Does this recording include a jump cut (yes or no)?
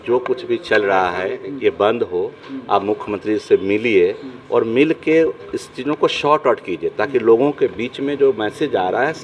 no